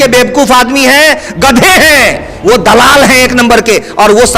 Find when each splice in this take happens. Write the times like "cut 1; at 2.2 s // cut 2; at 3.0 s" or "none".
cut 1; at 2.3 s